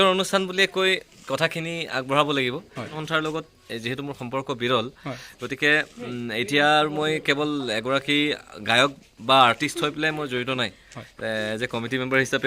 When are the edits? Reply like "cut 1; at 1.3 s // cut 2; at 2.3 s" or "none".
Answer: cut 1; at 2.9 s